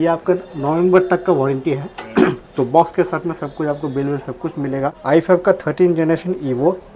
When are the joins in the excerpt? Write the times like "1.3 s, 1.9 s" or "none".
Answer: 5.0 s